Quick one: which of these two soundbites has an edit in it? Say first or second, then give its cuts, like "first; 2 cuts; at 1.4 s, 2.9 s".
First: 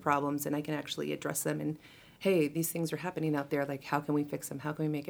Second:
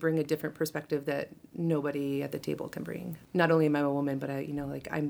second; 1 cut; at 3.1 s